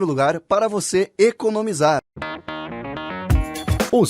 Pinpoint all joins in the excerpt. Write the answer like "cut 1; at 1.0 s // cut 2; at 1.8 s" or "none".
cut 1; at 2.1 s